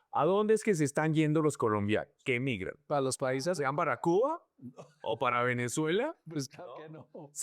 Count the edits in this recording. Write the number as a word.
one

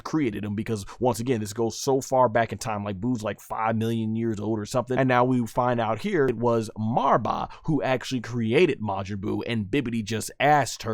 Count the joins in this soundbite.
two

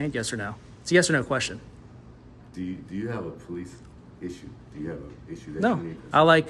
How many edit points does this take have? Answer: zero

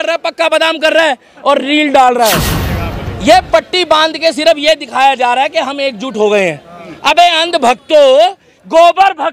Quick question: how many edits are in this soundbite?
one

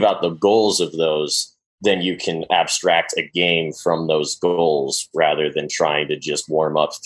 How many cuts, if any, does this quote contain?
zero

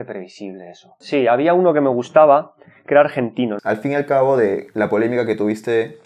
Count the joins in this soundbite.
two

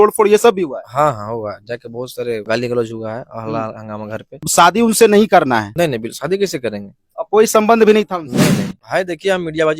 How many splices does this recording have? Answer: four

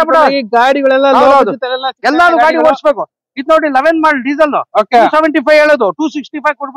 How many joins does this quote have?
zero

